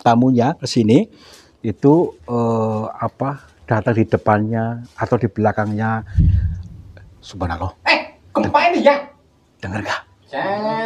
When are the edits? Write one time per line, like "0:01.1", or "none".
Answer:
0:06.1